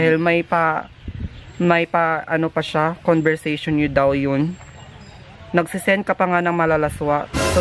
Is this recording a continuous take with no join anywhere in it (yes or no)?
yes